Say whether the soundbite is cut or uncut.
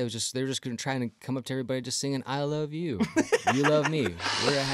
uncut